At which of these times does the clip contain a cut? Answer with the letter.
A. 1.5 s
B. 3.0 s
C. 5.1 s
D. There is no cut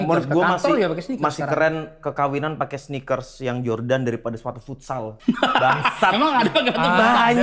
C